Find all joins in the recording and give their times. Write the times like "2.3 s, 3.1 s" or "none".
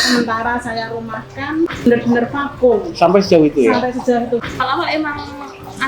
1.9 s, 4.4 s